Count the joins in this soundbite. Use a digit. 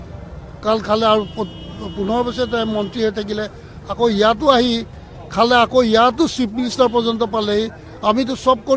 0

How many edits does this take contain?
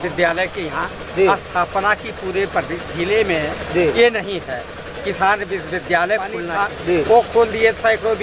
1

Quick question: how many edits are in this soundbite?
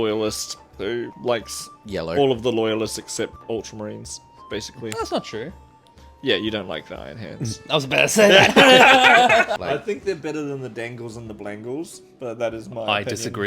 3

